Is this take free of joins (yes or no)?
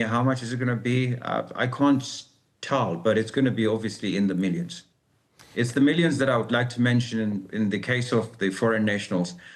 yes